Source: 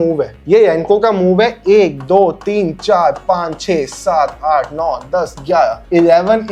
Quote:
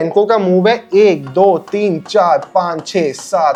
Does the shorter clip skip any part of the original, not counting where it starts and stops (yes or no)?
no